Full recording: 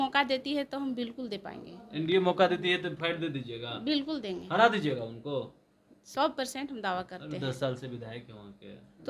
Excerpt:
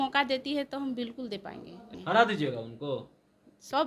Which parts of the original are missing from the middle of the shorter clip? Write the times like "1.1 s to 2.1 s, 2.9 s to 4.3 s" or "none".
1.9 s to 4.4 s